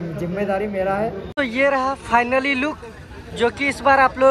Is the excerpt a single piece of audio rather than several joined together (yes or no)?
no